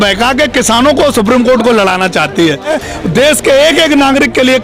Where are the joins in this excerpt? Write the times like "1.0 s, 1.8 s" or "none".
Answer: 2.7 s